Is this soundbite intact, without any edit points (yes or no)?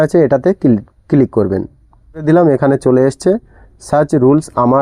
no